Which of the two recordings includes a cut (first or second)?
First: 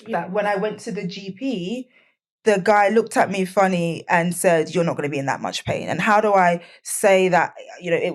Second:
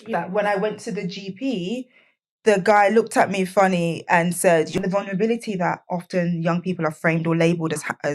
second